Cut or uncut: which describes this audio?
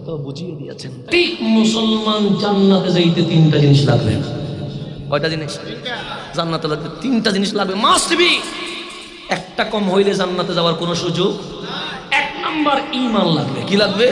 cut